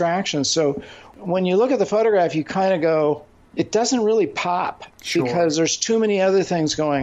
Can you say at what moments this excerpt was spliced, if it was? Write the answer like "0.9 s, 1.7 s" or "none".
1.1 s, 3.4 s